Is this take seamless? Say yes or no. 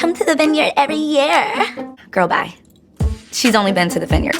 no